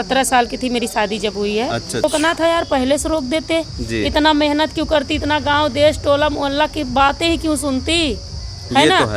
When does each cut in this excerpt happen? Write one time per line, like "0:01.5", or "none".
0:02.0